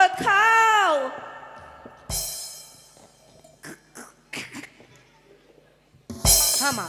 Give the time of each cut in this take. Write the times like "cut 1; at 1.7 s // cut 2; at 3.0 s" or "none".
none